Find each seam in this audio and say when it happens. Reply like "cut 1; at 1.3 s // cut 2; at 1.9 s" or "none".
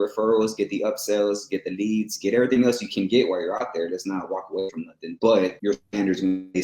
cut 1; at 5.1 s // cut 2; at 5.6 s

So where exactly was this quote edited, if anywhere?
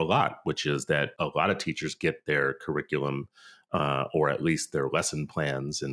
cut 1; at 1.1 s

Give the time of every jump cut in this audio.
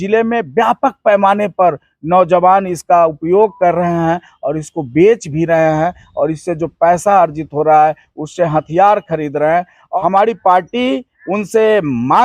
cut 1; at 9.8 s

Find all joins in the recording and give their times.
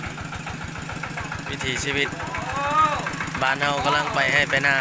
none

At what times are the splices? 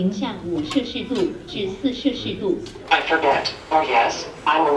cut 1; at 2.7 s

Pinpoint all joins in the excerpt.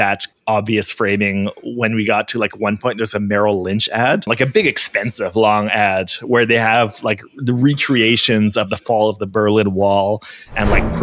cut 1; at 4.3 s

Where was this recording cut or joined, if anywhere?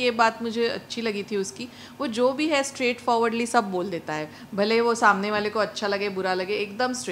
none

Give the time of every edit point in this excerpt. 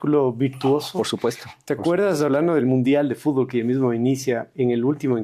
none

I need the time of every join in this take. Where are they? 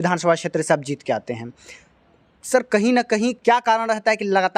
none

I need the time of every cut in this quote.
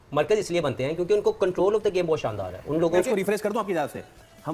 cut 1; at 3.1 s

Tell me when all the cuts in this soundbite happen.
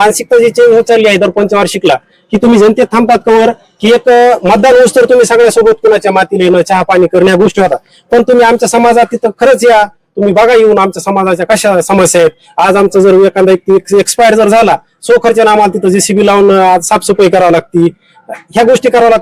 none

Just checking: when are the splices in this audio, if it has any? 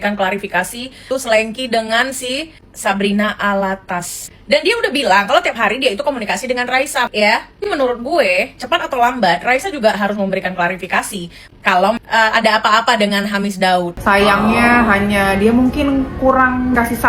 cut 1; at 1.0 s // cut 2; at 7.1 s // cut 3; at 12.0 s // cut 4; at 13.9 s

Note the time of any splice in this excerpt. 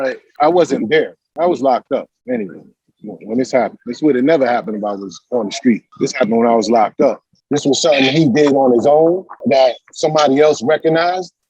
none

